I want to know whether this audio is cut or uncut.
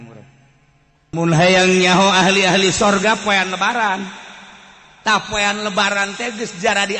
cut